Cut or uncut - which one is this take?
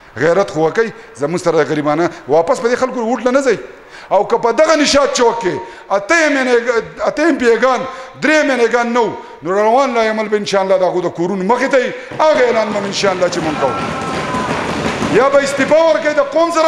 uncut